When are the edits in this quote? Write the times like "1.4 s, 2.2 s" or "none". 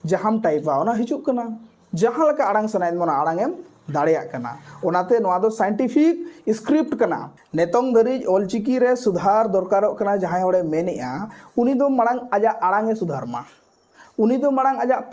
7.4 s